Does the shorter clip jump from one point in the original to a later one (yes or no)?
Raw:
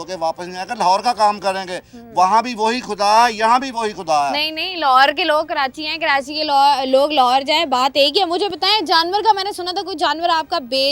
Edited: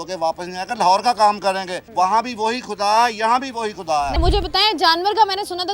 yes